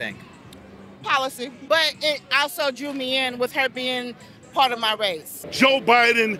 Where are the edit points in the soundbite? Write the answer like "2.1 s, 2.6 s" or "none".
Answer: 1.6 s, 5.3 s